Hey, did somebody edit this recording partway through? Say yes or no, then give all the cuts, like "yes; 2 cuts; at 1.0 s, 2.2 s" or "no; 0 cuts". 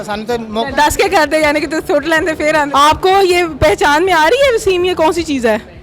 yes; 1 cut; at 2.7 s